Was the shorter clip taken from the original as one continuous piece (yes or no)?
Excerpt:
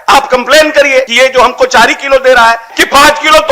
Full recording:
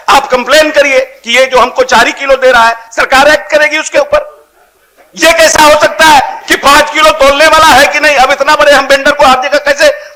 no